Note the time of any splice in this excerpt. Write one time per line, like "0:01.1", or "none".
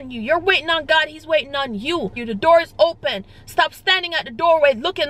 0:02.2